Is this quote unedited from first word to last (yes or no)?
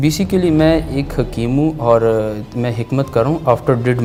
yes